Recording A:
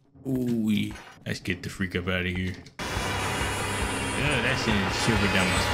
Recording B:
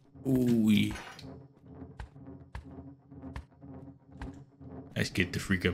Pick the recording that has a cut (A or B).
A